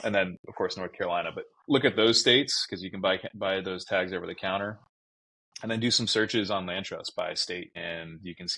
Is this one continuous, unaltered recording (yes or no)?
yes